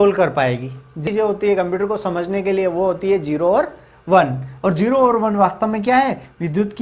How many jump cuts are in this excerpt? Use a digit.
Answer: 1